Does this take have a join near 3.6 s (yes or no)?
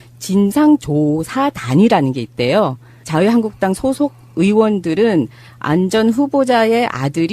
yes